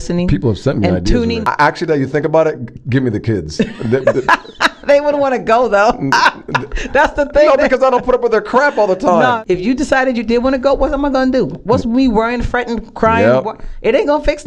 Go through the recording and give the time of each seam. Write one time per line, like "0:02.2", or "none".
0:01.5
0:09.4